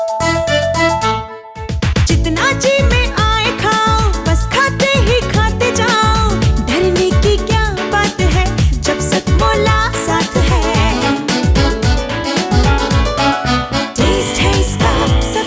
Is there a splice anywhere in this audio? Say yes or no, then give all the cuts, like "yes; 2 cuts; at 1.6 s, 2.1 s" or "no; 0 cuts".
no; 0 cuts